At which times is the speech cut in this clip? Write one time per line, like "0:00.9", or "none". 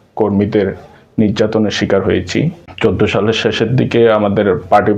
0:02.7